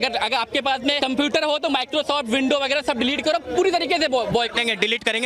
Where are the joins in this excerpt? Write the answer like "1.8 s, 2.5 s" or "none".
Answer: 1.0 s